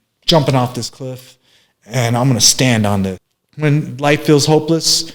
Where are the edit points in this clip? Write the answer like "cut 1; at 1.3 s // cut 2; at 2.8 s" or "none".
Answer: cut 1; at 3.2 s